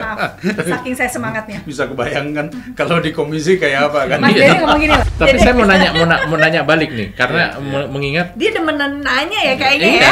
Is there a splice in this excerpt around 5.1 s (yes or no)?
yes